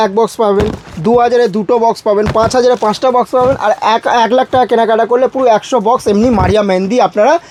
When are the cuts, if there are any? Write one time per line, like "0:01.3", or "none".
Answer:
none